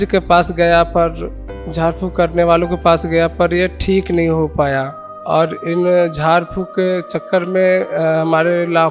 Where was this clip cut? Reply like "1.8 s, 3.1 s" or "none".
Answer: none

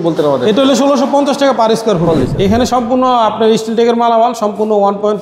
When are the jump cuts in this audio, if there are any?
2.1 s

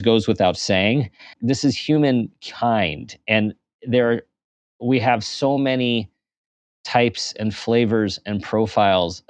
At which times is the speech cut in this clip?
1.3 s

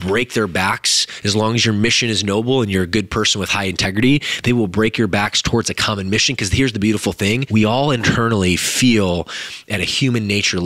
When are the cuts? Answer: 7.4 s

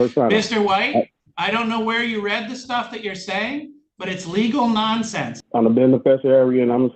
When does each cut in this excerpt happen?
1.2 s, 5.4 s

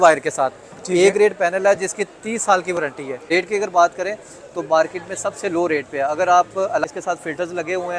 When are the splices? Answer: 3.1 s, 6.8 s

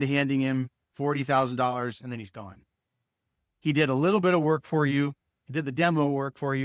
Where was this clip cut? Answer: 3.3 s

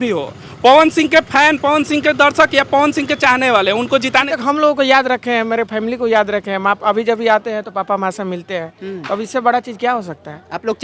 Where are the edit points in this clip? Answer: 4.3 s

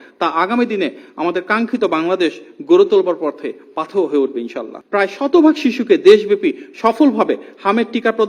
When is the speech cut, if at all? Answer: 4.7 s

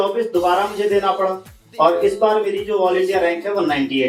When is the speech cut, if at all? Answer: none

